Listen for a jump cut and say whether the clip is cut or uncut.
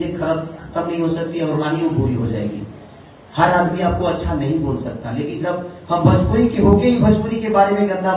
uncut